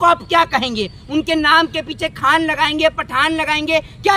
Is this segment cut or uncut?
uncut